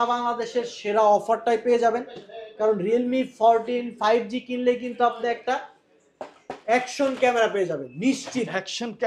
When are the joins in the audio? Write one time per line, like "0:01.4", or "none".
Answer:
none